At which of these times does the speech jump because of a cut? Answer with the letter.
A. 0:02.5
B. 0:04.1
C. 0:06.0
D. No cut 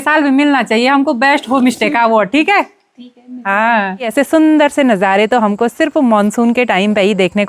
B